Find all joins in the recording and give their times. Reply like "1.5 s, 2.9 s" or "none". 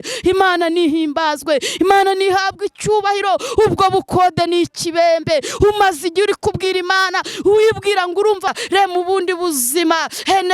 8.5 s